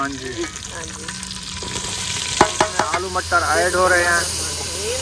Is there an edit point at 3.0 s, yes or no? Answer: yes